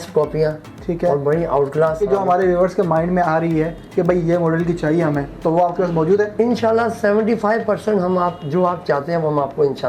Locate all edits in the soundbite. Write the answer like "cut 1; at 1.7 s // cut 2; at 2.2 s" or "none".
cut 1; at 2.0 s

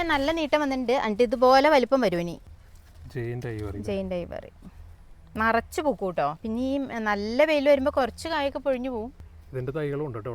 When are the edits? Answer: cut 1; at 2.5 s // cut 2; at 6.4 s // cut 3; at 9.2 s

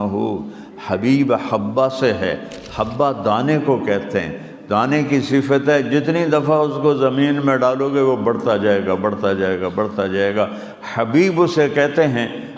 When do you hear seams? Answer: none

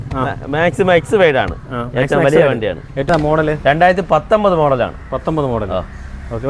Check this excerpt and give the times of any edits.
cut 1; at 3.1 s

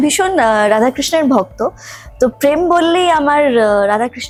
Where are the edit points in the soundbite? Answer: none

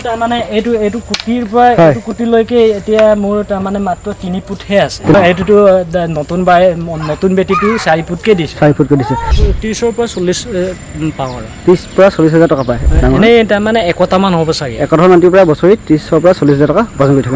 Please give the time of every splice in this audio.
cut 1; at 5.1 s // cut 2; at 9.4 s // cut 3; at 12.8 s

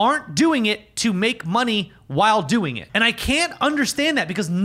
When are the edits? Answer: cut 1; at 2.8 s

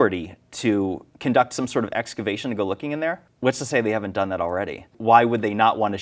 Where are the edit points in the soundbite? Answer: cut 1; at 1.1 s // cut 2; at 3.3 s // cut 3; at 4.9 s

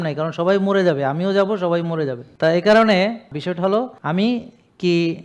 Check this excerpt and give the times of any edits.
cut 1; at 2.2 s // cut 2; at 3.7 s

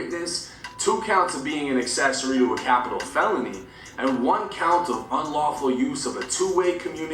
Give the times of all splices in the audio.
none

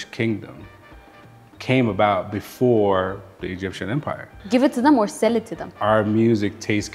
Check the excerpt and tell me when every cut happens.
cut 1; at 4.3 s // cut 2; at 5.6 s

